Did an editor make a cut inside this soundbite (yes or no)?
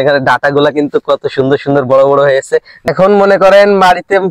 yes